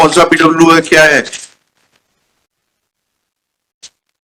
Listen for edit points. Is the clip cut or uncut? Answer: uncut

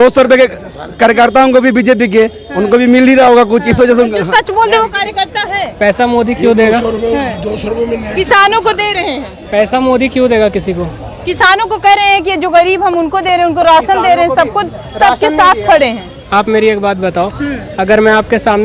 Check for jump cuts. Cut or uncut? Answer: uncut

